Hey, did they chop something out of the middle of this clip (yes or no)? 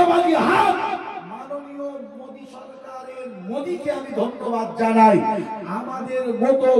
no